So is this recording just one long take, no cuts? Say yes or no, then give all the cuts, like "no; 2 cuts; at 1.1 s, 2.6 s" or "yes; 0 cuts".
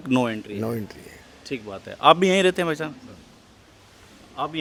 yes; 0 cuts